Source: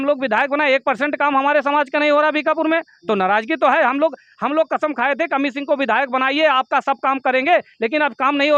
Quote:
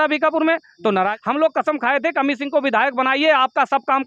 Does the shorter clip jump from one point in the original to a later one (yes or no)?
yes